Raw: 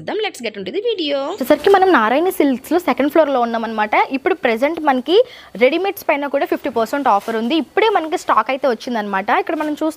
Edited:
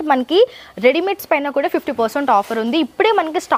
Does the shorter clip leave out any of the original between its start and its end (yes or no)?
no